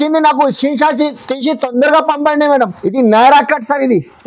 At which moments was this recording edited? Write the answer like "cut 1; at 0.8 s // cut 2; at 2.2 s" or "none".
cut 1; at 2.8 s